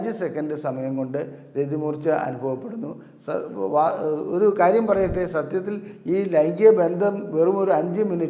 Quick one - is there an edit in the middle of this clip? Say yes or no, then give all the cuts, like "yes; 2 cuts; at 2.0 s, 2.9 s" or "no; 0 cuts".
no; 0 cuts